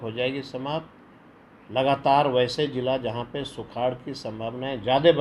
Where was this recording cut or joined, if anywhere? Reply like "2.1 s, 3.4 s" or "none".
none